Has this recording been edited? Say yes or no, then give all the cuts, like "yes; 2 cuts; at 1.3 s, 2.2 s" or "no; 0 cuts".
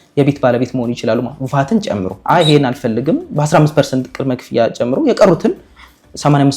yes; 1 cut; at 2.2 s